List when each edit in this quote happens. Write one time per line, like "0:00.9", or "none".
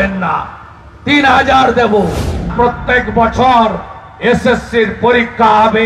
0:02.5